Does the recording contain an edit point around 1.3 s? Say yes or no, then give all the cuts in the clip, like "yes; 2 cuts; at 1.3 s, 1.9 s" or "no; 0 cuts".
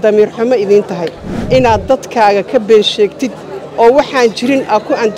yes; 1 cut; at 1.3 s